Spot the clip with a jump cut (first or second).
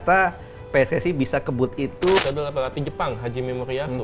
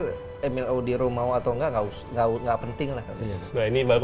first